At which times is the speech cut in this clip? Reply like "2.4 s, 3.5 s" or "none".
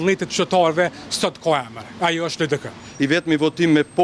2.8 s